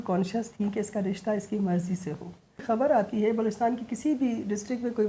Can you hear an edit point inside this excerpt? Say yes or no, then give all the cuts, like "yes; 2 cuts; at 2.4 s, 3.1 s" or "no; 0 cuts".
yes; 1 cut; at 2.6 s